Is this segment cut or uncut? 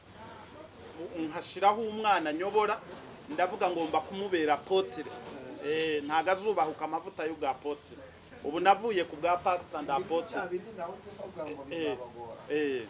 uncut